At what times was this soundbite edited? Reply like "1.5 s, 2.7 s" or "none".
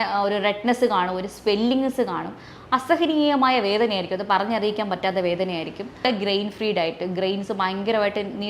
6.0 s